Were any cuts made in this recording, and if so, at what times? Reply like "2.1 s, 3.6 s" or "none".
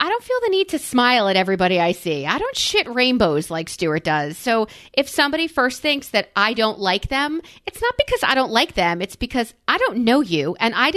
none

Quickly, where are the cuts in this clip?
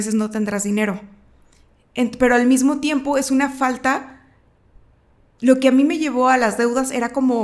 none

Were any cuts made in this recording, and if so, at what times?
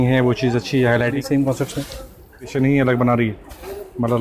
1.1 s, 2.5 s

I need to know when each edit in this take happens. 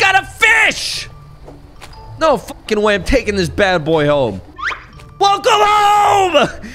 none

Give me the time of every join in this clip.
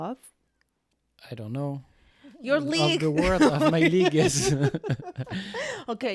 none

